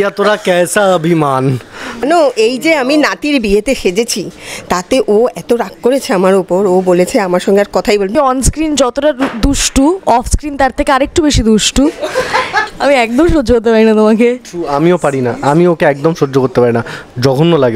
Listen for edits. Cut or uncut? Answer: cut